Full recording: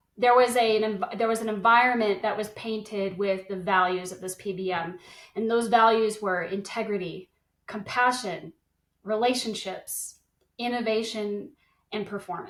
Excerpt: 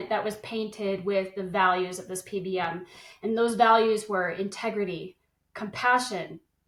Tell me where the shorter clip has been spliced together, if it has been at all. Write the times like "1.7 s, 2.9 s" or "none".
none